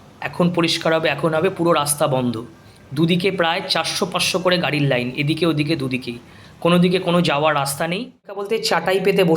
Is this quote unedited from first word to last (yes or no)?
no